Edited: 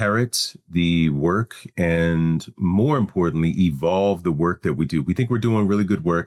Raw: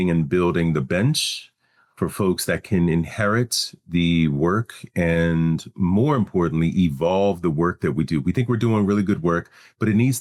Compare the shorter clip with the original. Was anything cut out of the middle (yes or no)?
no